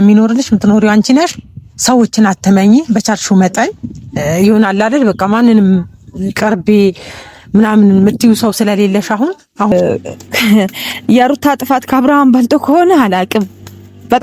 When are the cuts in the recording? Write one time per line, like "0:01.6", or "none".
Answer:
0:09.7